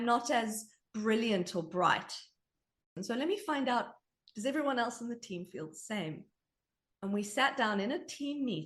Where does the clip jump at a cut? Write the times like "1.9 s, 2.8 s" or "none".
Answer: 3.0 s